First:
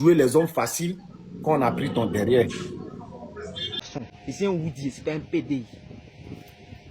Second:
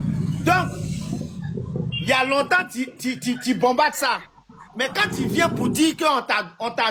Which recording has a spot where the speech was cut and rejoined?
first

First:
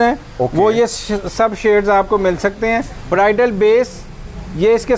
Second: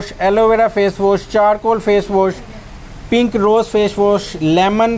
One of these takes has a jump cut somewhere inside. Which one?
first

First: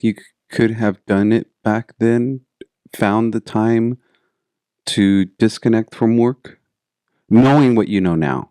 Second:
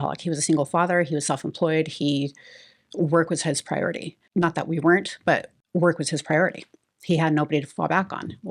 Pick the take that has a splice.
second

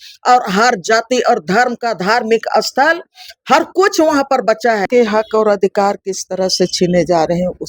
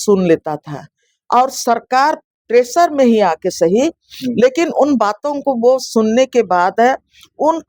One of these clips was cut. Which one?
first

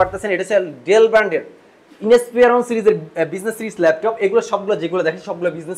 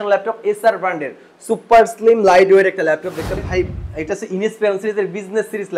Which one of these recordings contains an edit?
second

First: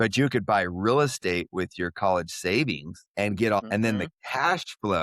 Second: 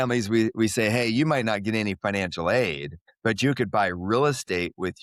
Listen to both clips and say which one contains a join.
first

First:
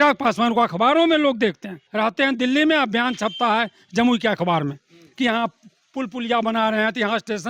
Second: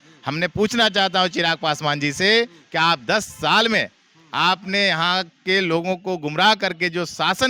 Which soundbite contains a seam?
first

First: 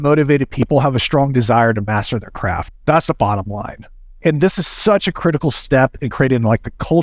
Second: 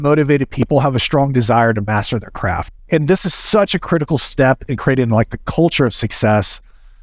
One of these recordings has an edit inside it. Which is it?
second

